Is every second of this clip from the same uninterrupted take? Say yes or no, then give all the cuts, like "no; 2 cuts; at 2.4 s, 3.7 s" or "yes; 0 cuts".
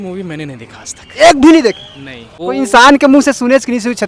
yes; 0 cuts